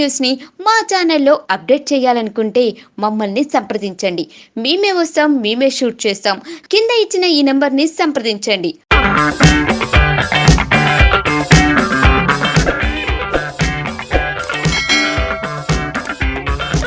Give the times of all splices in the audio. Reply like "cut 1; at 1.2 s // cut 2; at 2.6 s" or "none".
none